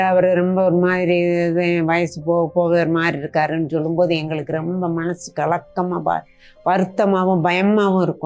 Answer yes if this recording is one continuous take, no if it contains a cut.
yes